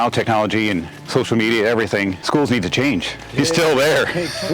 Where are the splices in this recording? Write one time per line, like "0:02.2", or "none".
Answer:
0:00.9
0:02.2
0:03.2